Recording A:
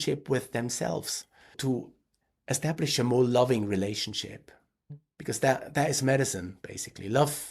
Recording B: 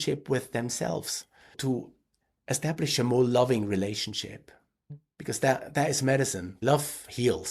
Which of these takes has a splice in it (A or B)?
B